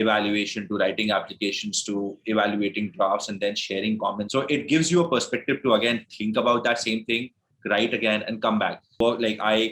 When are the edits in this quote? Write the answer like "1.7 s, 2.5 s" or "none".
4.2 s, 9.0 s